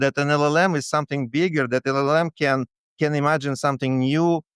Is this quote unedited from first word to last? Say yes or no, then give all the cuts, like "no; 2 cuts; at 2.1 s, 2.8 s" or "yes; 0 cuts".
yes; 0 cuts